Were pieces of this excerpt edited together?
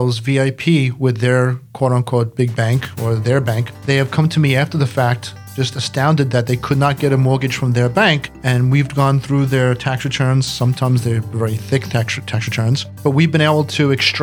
no; 0 cuts

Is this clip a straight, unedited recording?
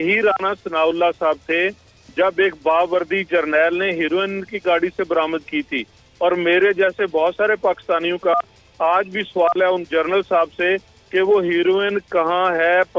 yes; 0 cuts

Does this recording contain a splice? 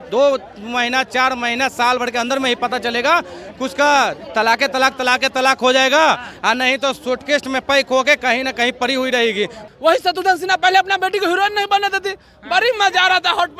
yes; 1 cut; at 9.6 s

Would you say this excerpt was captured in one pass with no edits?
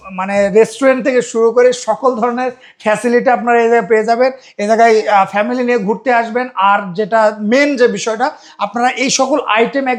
yes; 0 cuts

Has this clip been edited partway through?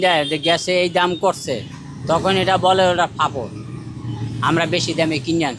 no; 0 cuts

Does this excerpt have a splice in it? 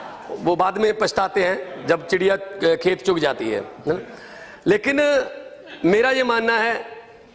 no; 0 cuts

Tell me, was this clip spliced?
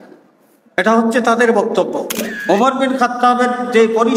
yes; 1 cut; at 2.3 s

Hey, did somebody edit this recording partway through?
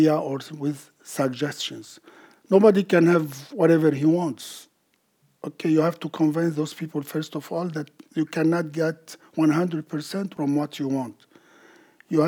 no; 0 cuts

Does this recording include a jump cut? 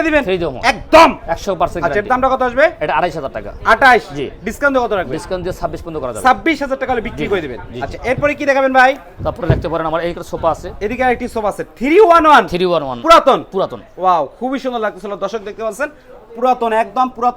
no; 0 cuts

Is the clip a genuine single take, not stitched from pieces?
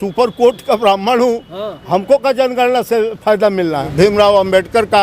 no; 1 cut; at 3.8 s

